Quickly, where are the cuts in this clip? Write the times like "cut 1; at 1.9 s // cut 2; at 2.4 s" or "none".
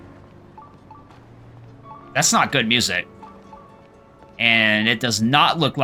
none